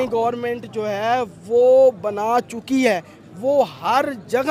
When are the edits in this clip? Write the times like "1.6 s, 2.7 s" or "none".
none